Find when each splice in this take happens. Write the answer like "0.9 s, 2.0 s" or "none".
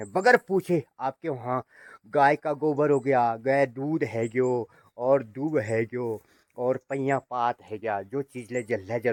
none